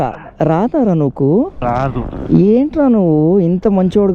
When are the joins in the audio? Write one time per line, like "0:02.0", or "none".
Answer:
0:01.6